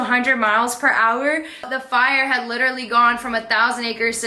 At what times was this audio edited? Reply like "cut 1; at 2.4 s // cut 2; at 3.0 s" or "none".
cut 1; at 1.7 s